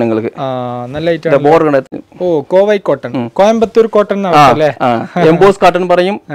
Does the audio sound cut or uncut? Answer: cut